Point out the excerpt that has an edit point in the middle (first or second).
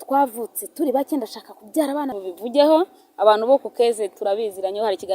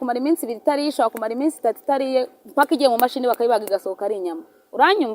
first